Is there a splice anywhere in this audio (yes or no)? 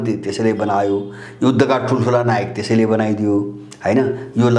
no